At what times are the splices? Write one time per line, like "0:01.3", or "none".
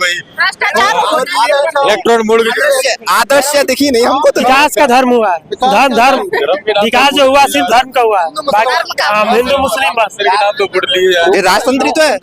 0:04.4
0:11.2